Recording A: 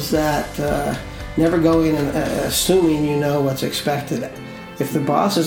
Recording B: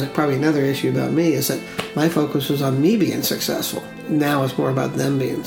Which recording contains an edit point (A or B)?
B